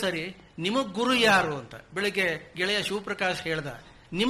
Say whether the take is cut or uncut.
uncut